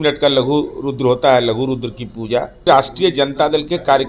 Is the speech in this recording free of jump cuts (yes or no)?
no